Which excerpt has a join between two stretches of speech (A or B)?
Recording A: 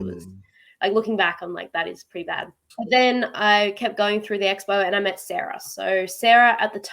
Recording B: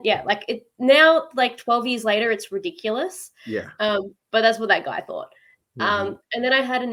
A